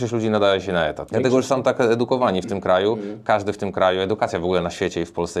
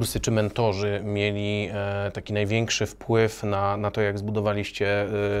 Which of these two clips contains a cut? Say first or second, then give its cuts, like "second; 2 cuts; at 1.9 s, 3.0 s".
first; 1 cut; at 1.0 s